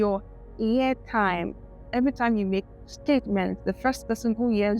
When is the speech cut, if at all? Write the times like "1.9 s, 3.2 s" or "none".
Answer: 1.9 s

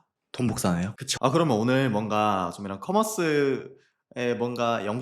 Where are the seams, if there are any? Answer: 1.1 s

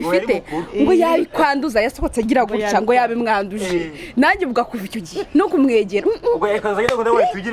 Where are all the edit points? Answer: none

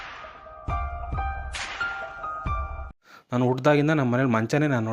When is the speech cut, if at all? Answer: 2.9 s

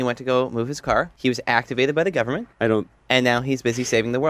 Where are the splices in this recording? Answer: 1.1 s

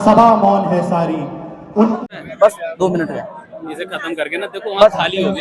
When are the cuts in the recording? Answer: 2.0 s

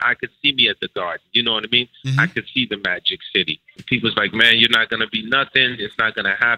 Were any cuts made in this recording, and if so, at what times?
3.8 s

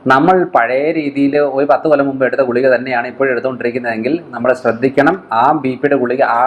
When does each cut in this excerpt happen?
none

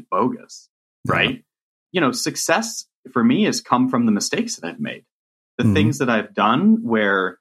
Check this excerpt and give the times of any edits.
1.8 s

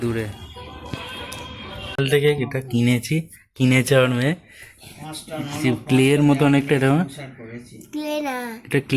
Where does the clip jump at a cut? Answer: 1.9 s

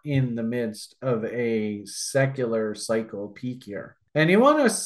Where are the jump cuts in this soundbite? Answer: 3.9 s

